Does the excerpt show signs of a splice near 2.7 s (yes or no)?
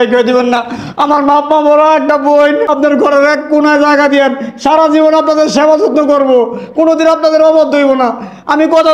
yes